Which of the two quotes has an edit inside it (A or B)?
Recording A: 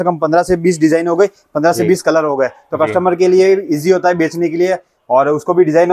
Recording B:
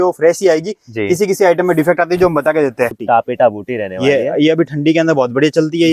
B